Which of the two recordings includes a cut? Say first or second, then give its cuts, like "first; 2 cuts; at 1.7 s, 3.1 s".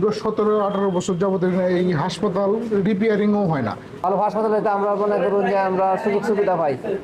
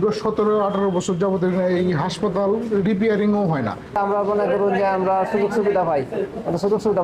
second; 1 cut; at 3.9 s